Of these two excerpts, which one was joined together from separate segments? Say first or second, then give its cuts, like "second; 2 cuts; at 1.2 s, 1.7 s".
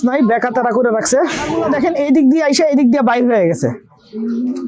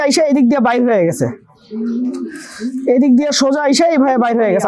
first; 1 cut; at 1.5 s